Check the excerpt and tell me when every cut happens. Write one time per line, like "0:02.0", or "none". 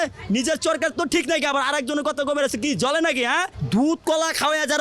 0:03.5